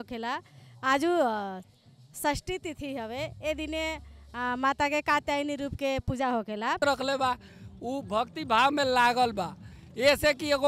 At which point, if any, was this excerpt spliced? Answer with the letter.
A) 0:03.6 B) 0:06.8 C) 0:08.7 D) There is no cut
B